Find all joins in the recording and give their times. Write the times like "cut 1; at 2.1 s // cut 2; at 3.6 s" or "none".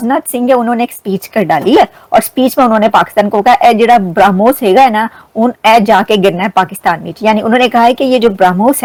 none